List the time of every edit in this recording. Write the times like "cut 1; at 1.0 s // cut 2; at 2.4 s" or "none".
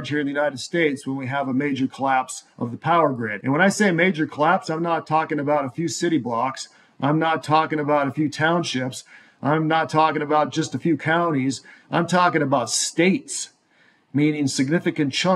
none